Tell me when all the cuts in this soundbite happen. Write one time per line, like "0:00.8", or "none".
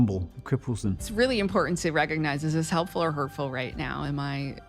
0:01.0